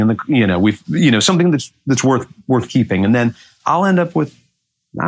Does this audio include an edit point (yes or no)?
no